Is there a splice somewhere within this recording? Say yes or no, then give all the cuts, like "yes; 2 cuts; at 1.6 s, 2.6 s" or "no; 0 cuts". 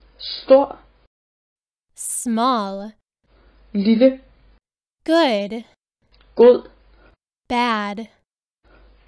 no; 0 cuts